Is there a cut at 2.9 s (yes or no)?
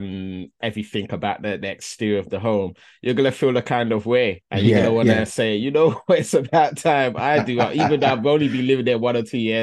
no